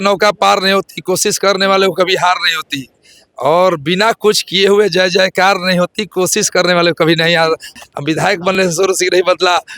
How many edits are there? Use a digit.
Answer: 1